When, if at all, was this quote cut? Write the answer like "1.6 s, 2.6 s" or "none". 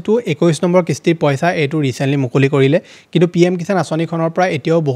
none